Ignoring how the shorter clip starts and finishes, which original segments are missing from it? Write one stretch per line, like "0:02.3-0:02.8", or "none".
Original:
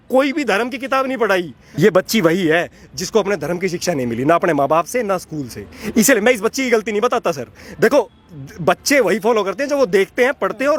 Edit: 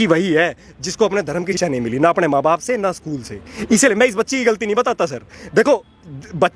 0:03.7-0:03.8